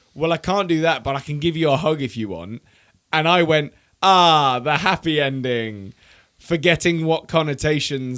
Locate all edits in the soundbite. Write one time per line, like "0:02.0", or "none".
none